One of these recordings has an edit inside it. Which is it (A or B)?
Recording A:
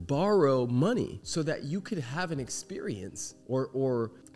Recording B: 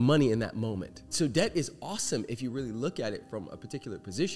B